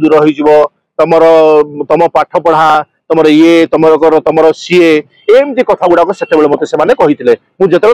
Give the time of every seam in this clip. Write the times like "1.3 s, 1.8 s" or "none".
none